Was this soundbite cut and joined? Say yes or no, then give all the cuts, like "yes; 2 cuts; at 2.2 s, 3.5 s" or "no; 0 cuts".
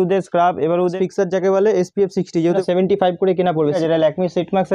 yes; 3 cuts; at 0.9 s, 2.6 s, 3.8 s